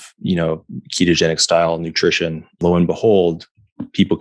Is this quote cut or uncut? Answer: cut